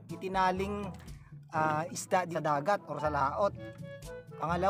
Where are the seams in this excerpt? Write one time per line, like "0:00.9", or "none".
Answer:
0:02.3